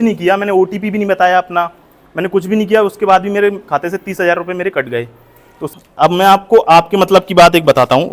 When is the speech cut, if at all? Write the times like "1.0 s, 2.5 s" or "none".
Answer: 5.7 s